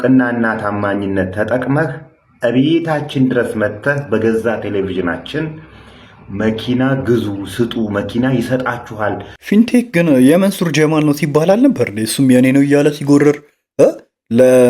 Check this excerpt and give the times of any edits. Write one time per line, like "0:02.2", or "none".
0:09.3